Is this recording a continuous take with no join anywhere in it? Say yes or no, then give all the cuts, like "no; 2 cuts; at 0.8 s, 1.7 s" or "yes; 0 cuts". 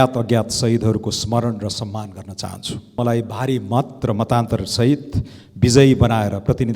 no; 1 cut; at 3.0 s